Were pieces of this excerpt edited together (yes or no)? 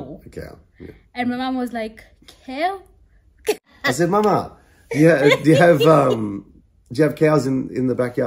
yes